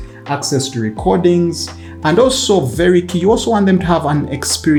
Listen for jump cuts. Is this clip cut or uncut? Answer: uncut